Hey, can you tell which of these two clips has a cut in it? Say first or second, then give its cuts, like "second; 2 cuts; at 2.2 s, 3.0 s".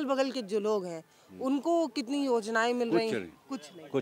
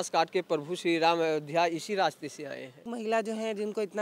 second; 1 cut; at 2.9 s